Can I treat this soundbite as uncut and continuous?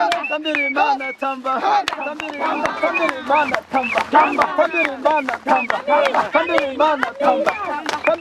yes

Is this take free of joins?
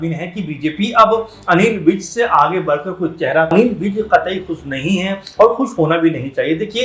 no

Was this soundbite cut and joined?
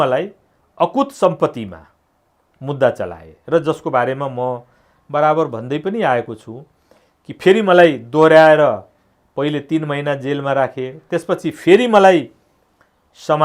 no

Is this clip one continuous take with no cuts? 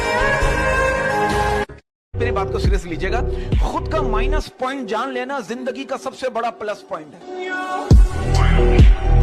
no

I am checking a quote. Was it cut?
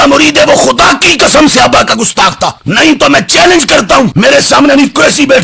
no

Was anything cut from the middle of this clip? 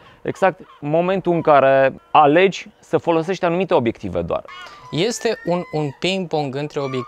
yes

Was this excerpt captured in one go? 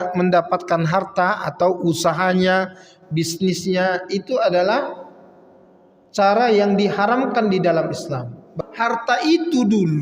no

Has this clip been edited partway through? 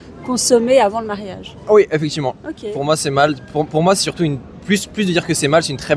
no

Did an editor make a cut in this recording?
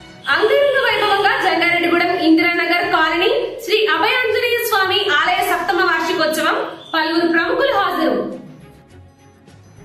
no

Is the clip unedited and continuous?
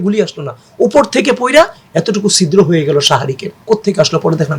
no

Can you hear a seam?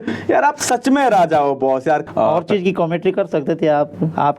yes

